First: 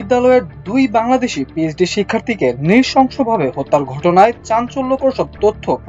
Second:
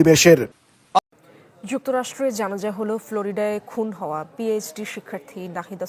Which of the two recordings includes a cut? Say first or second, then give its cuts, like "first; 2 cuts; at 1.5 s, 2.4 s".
second; 1 cut; at 1.0 s